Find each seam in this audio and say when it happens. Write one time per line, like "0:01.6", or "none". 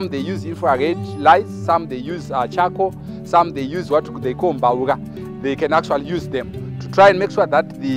none